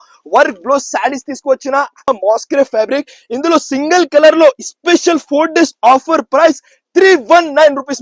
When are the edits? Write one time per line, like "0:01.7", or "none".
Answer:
0:02.1